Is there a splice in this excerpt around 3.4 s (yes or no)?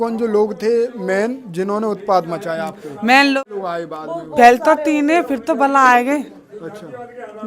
yes